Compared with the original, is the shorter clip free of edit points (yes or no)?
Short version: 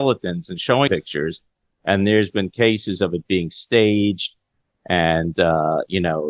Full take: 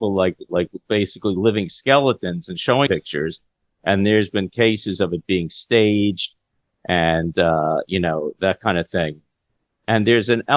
yes